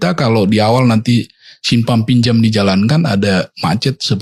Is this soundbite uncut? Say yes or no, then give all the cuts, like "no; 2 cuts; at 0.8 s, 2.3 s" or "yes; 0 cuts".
yes; 0 cuts